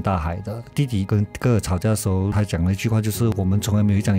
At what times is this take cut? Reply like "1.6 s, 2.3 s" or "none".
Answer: 0.8 s, 2.3 s, 3.3 s